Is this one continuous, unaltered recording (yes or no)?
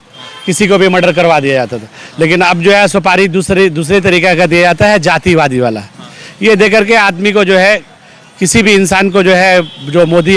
yes